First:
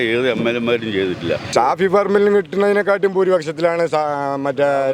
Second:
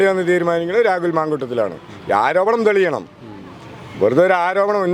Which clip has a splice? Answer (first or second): first